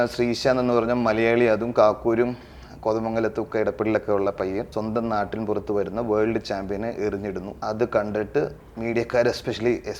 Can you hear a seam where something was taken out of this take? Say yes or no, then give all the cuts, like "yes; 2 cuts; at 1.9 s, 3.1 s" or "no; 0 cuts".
yes; 2 cuts; at 4.7 s, 7.5 s